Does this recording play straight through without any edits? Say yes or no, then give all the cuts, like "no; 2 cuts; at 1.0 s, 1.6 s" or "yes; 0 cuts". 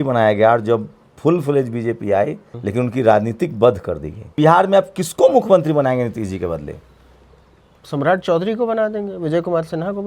no; 2 cuts; at 2.5 s, 4.3 s